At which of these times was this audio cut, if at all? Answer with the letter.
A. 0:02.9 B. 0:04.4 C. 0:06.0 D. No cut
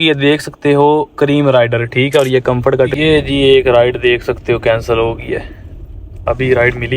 A